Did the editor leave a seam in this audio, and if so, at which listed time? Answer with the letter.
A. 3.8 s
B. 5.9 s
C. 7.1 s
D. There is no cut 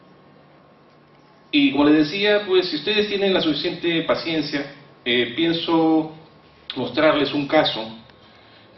A